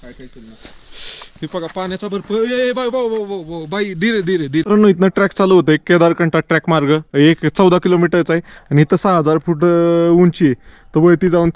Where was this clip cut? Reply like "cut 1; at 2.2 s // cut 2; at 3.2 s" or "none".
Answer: cut 1; at 4.7 s